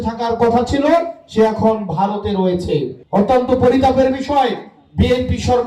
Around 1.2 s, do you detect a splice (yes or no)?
no